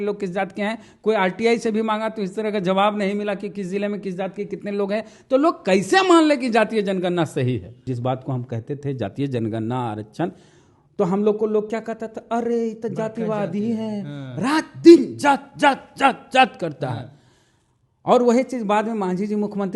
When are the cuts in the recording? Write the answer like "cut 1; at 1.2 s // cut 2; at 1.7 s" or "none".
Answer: cut 1; at 7.8 s